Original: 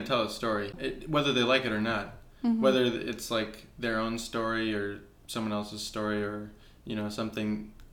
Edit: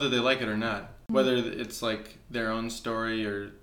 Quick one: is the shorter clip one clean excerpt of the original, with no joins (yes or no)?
no